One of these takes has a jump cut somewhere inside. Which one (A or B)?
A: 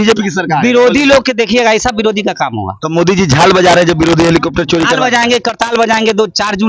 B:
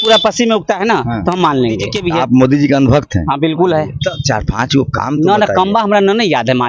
B